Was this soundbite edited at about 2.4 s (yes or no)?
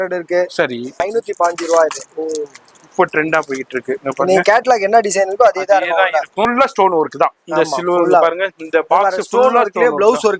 no